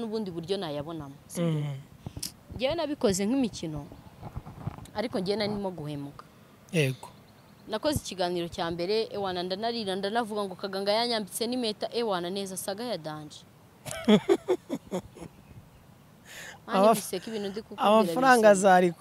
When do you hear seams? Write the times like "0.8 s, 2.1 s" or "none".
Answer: none

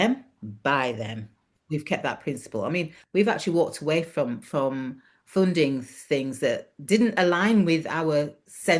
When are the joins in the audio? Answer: 1.5 s

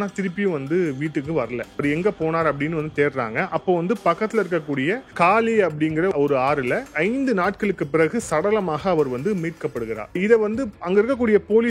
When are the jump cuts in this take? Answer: 1.8 s, 5.1 s, 6.1 s, 10.2 s

